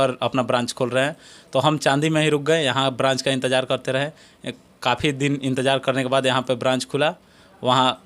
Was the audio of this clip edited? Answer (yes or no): no